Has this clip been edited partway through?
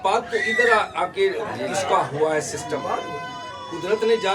no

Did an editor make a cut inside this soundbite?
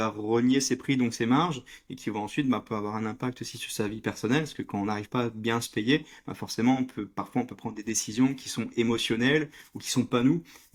no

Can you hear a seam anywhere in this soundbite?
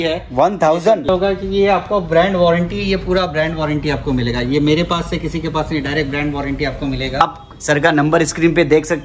yes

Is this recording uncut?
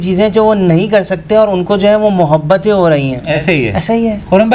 yes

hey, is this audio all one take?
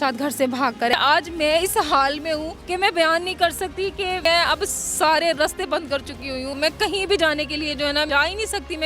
no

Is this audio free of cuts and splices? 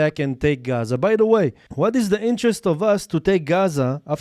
no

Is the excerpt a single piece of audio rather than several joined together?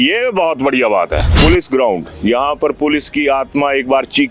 no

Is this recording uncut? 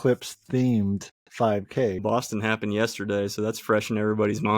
no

